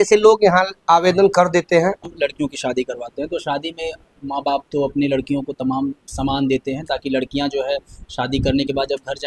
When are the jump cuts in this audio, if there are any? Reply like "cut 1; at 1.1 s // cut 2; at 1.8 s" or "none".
cut 1; at 2.0 s